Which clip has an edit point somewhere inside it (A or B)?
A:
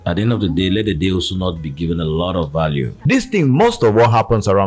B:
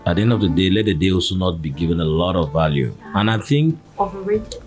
A